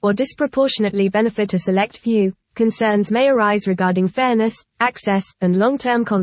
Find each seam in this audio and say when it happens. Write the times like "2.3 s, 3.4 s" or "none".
none